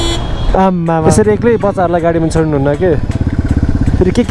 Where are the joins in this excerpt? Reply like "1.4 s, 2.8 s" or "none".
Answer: 1.0 s